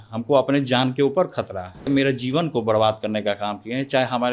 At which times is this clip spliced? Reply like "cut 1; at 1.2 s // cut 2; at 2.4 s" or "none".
cut 1; at 1.9 s